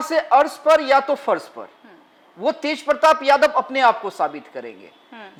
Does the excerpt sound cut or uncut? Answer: uncut